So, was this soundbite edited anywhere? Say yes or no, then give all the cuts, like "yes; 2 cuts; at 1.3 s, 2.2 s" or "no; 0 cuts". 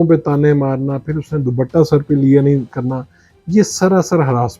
no; 0 cuts